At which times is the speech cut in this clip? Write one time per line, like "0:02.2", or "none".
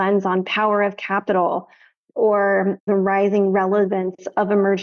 0:02.8